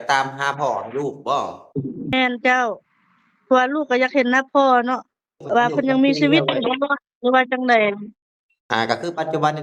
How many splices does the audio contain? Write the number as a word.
zero